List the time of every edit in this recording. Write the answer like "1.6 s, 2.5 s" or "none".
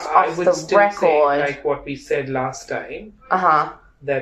1.8 s